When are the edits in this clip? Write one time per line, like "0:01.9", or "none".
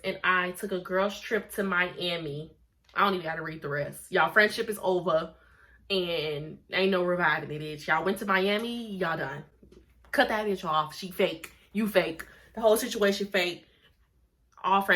none